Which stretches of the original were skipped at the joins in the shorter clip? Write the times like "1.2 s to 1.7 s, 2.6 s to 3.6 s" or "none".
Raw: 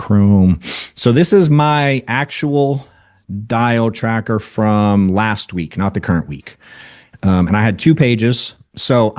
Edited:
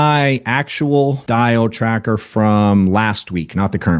2.8 s to 3.4 s